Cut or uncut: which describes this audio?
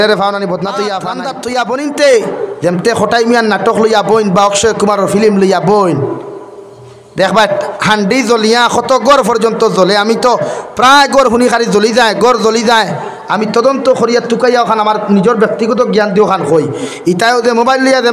cut